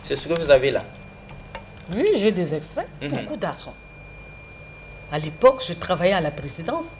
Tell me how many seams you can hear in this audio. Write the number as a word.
one